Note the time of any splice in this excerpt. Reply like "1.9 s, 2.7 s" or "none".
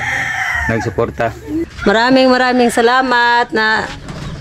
1.6 s